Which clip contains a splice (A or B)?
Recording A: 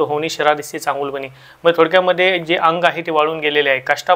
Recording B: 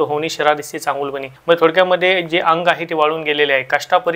B